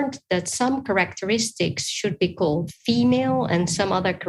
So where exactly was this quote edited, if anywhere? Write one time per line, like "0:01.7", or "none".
none